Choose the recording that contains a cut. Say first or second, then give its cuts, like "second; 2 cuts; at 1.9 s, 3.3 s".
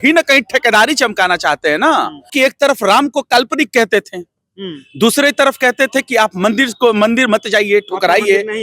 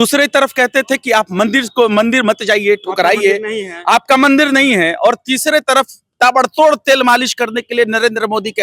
first; 1 cut; at 2.3 s